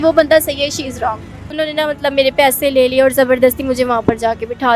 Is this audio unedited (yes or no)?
no